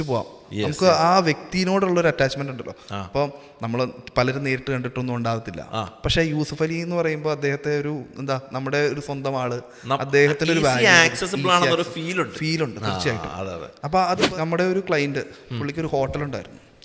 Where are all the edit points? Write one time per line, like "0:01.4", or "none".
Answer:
0:14.2